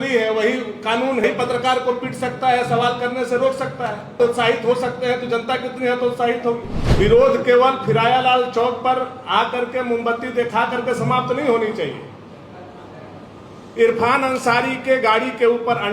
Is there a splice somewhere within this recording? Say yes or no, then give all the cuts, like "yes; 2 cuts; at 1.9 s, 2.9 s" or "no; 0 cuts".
yes; 3 cuts; at 1.2 s, 4.2 s, 6.8 s